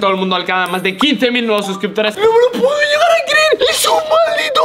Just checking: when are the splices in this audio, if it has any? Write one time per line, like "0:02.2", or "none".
0:02.2
0:03.6